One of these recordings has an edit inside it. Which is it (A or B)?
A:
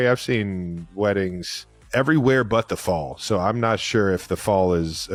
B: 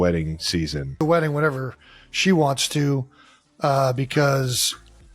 B